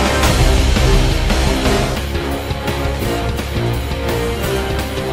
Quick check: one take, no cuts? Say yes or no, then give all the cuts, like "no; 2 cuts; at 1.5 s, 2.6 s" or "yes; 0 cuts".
yes; 0 cuts